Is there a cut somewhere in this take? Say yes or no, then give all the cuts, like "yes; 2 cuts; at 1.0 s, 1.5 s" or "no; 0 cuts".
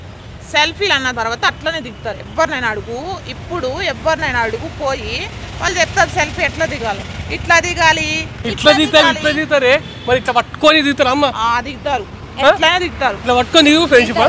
no; 0 cuts